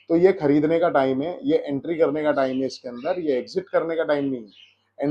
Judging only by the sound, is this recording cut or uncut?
uncut